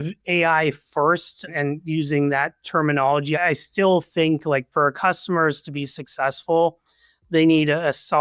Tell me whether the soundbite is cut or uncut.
cut